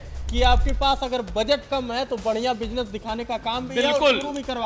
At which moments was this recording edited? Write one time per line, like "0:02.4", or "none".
none